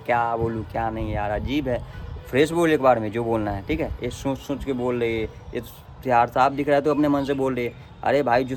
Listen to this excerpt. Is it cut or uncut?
uncut